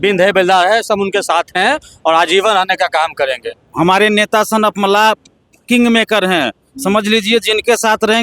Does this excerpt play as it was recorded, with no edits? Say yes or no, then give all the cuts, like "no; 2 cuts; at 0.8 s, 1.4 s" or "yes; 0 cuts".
no; 1 cut; at 3.7 s